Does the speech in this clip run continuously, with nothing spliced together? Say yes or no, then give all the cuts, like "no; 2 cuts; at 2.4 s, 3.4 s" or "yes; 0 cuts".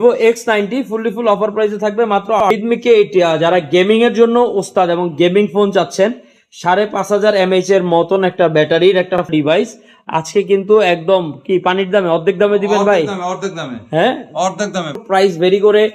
no; 3 cuts; at 2.5 s, 9.3 s, 15.0 s